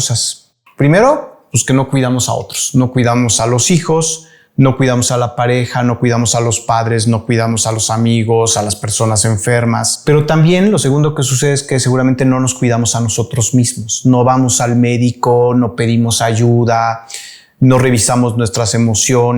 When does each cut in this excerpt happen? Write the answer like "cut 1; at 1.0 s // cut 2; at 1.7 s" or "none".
cut 1; at 9.9 s

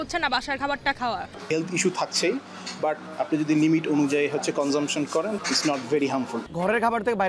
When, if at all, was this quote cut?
cut 1; at 1.4 s // cut 2; at 3.1 s // cut 3; at 5.4 s // cut 4; at 6.4 s

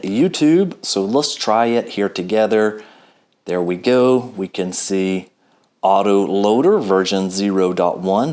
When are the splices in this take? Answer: none

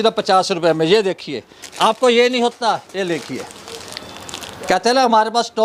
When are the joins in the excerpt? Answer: none

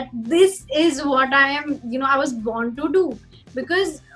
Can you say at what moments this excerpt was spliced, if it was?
none

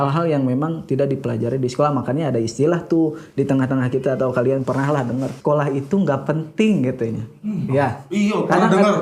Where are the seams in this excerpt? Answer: cut 1; at 5.4 s

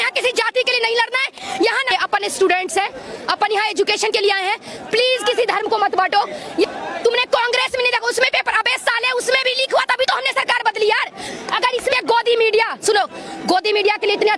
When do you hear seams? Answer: cut 1; at 1.9 s // cut 2; at 6.7 s // cut 3; at 12.0 s

